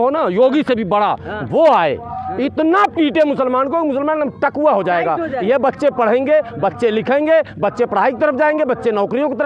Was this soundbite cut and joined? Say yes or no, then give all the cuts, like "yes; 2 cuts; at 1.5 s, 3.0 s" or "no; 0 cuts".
no; 0 cuts